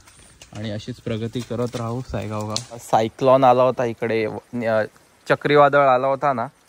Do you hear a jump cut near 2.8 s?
yes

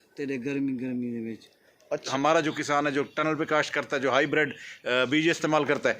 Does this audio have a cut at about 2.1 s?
yes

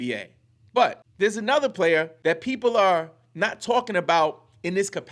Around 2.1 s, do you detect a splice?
yes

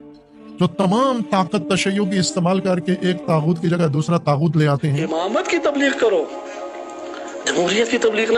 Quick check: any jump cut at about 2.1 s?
no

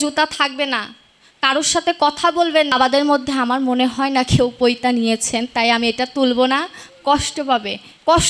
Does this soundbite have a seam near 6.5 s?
no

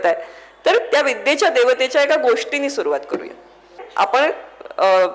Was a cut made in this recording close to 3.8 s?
yes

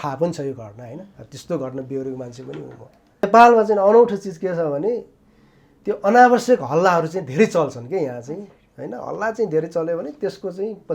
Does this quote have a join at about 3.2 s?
yes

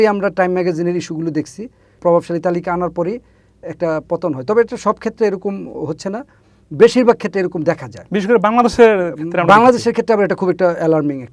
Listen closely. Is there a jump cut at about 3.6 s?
no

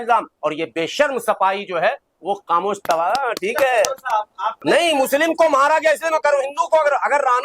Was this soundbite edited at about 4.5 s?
yes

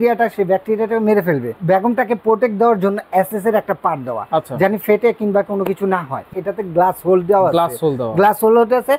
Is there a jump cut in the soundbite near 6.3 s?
yes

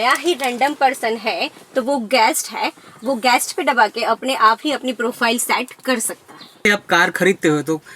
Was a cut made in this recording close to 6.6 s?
yes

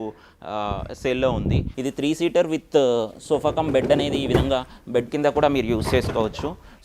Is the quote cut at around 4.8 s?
no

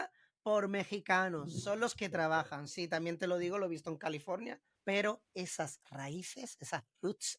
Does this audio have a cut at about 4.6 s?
yes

